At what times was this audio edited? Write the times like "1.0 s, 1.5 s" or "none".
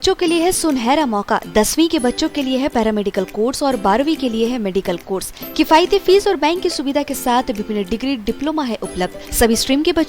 none